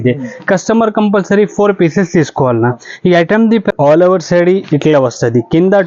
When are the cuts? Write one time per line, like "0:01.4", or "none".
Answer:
0:03.7